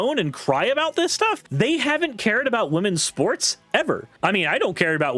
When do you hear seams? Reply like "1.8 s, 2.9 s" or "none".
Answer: 1.5 s, 4.1 s